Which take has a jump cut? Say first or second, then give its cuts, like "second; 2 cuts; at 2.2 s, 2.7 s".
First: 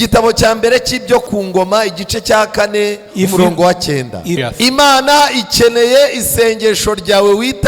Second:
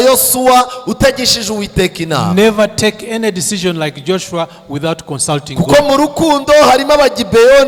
first; 1 cut; at 4.5 s